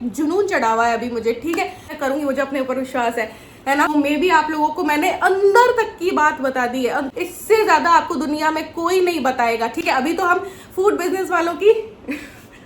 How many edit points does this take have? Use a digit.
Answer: 3